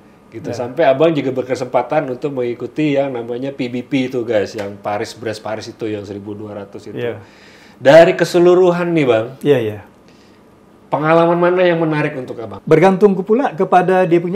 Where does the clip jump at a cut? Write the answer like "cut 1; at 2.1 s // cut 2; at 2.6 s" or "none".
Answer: cut 1; at 12.5 s